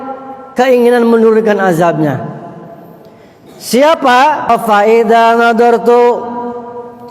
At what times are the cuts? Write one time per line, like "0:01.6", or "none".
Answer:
0:04.5

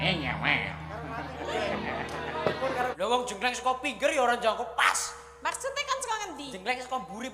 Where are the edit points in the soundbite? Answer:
0:02.9

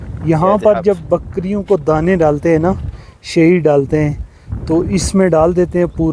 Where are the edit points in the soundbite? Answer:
none

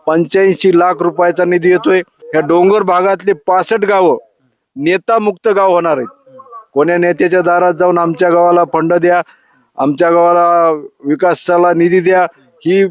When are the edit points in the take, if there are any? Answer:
0:02.2

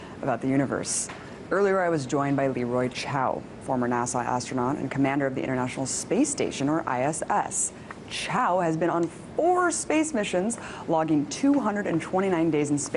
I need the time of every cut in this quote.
none

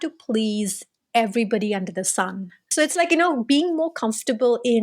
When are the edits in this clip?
0:02.6

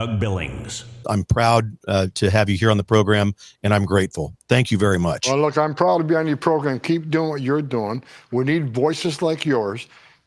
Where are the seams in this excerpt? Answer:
0:01.0

